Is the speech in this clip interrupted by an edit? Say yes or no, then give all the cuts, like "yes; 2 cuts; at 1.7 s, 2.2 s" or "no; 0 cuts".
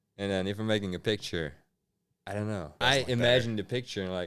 yes; 1 cut; at 2.7 s